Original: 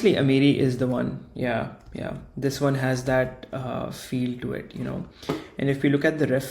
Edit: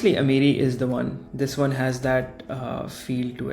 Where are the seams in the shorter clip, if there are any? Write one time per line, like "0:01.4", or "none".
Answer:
0:01.2